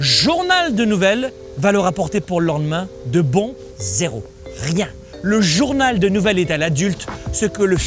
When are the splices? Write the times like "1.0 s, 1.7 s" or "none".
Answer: 1.4 s, 3.6 s, 5.1 s

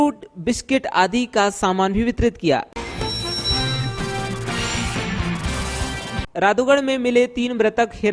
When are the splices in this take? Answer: 2.6 s, 6.2 s

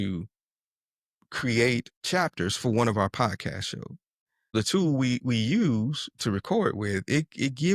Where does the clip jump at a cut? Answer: 1.9 s, 4.5 s

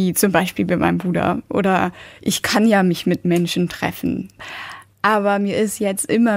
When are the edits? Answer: 2.1 s, 4.4 s

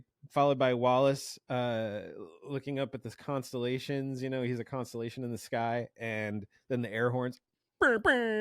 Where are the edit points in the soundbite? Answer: none

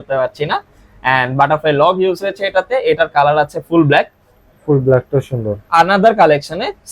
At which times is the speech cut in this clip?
5.7 s

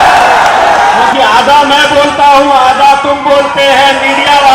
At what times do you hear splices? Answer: 1.0 s

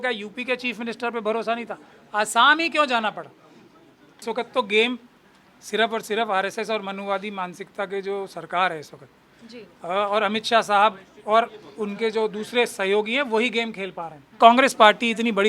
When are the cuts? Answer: 4.2 s, 14.3 s

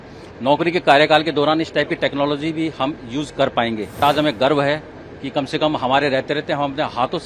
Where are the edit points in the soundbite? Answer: 4.0 s

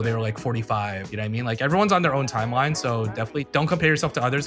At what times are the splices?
1.1 s, 3.5 s

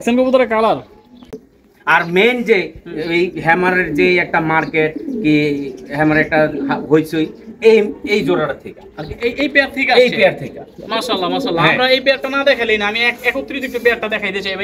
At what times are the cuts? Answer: 1.4 s

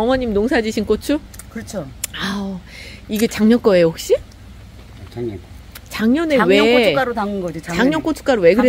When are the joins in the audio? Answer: none

